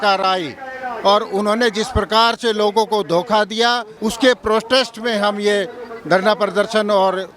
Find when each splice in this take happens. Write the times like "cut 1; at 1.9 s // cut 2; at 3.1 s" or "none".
cut 1; at 3.9 s